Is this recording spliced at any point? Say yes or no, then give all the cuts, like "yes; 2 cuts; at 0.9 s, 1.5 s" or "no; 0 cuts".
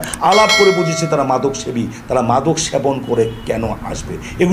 no; 0 cuts